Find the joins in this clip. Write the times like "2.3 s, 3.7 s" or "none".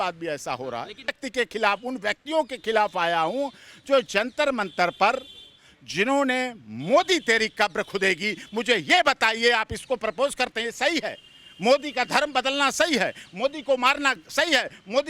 1.2 s

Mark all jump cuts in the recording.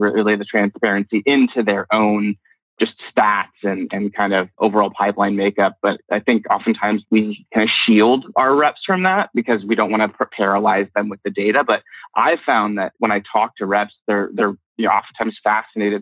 2.5 s, 4.5 s, 6.0 s, 7.0 s, 13.0 s

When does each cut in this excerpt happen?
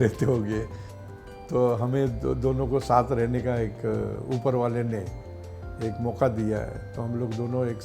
none

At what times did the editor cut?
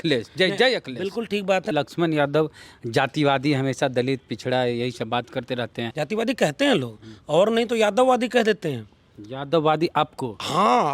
1.7 s, 5.9 s

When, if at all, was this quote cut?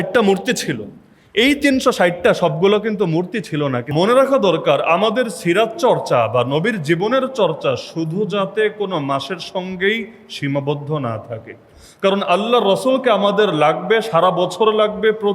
3.9 s

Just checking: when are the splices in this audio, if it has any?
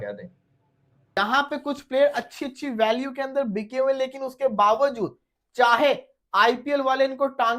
1.2 s

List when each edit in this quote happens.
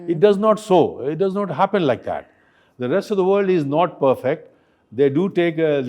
none

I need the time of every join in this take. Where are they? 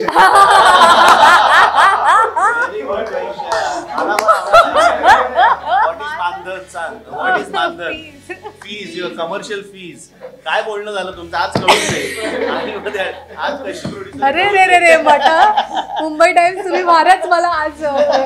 none

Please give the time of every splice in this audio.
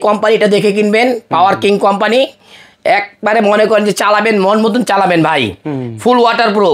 none

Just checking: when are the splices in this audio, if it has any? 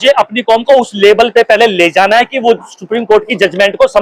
none

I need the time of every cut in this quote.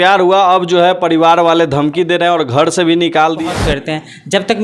3.5 s

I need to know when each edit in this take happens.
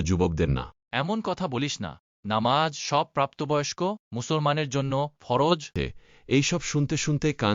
5.7 s

